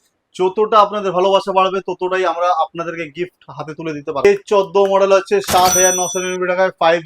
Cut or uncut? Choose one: cut